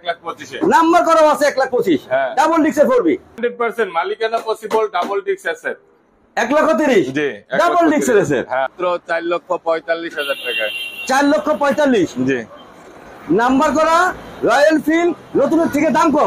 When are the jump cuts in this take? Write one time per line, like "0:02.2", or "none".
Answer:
0:03.3
0:08.8